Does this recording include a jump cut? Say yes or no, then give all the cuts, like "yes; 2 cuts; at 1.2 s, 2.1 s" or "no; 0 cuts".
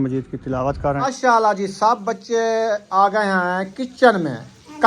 yes; 1 cut; at 1.1 s